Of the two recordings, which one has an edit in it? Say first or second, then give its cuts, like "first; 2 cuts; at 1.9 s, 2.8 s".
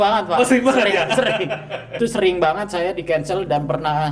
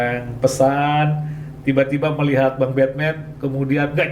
first; 1 cut; at 2.0 s